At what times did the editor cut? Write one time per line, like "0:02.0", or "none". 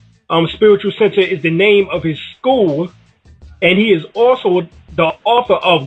none